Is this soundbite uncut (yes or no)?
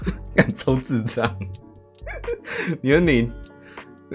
yes